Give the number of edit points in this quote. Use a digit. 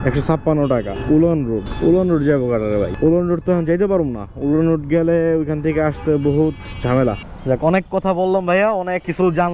4